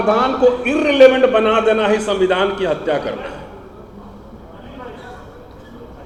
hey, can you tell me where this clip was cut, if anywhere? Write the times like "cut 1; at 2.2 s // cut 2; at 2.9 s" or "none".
none